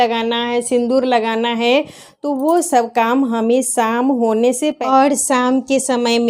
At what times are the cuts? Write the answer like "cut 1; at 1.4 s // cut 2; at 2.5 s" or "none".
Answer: cut 1; at 4.8 s